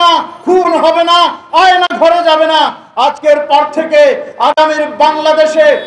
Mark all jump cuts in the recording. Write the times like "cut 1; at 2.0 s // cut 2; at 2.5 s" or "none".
none